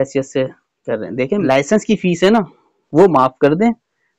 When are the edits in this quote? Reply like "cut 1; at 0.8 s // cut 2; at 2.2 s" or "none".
cut 1; at 1.4 s